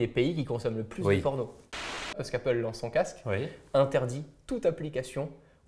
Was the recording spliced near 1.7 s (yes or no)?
yes